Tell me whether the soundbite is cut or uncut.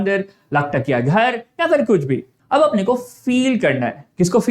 cut